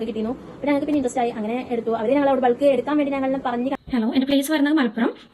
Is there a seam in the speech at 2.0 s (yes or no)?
no